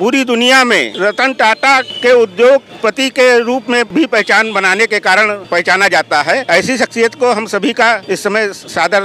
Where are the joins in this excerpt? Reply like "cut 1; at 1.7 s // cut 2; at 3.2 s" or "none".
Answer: cut 1; at 0.9 s // cut 2; at 1.9 s // cut 3; at 2.7 s // cut 4; at 3.9 s // cut 5; at 5.4 s // cut 6; at 6.4 s // cut 7; at 8.0 s